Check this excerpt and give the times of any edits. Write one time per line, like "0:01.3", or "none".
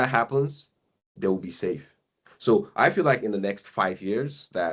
none